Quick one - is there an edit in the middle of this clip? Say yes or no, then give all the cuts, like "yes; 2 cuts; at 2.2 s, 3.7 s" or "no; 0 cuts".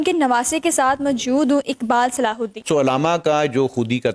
yes; 1 cut; at 2.5 s